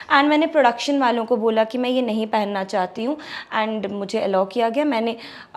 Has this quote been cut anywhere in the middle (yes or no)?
no